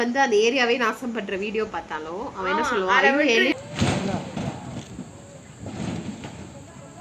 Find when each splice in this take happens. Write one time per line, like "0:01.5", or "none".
none